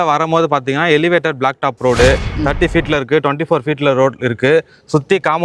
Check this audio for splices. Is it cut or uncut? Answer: uncut